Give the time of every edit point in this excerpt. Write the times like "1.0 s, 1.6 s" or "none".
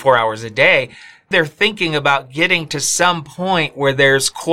1.3 s